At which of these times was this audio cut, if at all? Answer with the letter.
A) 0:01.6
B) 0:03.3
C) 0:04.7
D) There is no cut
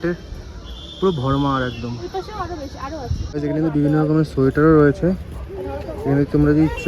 B